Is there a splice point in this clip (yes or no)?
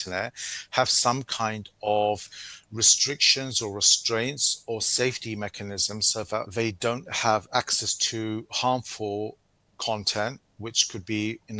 yes